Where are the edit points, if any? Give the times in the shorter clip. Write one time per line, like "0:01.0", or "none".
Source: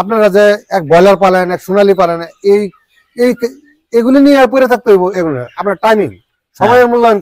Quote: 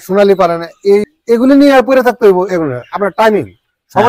0:01.1